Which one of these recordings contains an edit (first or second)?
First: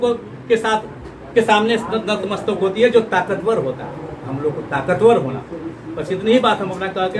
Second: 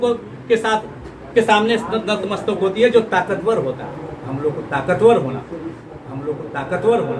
second